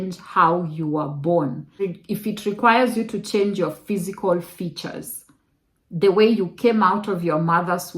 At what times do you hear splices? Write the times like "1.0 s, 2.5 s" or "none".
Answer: 1.7 s